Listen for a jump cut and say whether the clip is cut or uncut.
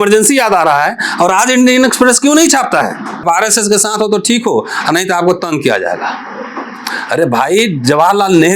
cut